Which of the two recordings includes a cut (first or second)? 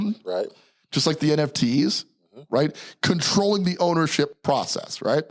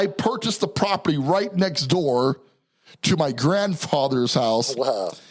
first